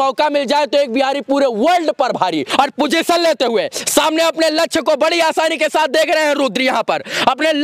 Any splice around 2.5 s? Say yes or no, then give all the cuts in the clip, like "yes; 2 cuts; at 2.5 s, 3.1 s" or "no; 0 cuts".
yes; 1 cut; at 2.5 s